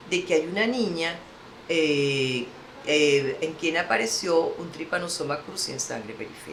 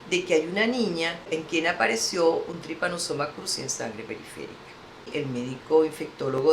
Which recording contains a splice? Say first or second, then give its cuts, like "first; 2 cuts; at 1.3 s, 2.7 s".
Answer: second; 2 cuts; at 1.3 s, 5.1 s